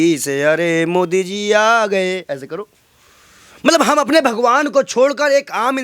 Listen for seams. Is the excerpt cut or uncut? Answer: uncut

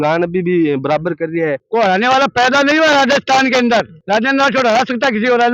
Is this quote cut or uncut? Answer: cut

